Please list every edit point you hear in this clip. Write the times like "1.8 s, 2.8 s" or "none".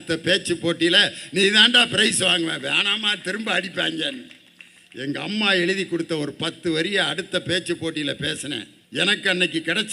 8.7 s